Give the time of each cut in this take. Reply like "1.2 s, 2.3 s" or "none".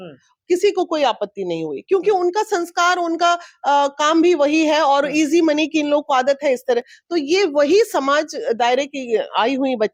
none